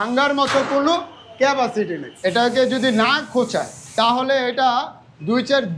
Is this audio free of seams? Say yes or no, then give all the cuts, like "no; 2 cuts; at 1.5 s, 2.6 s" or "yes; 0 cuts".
no; 2 cuts; at 2.5 s, 3.9 s